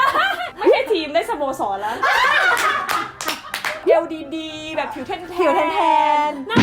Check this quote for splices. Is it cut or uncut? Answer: cut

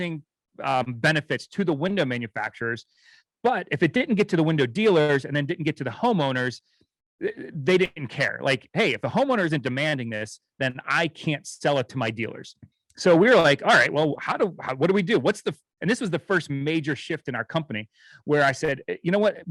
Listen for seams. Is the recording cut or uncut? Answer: uncut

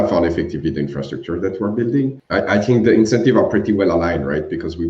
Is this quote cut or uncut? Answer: cut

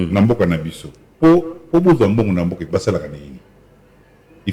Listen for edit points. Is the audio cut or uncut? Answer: uncut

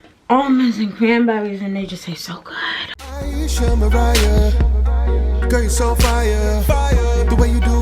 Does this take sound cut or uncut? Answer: cut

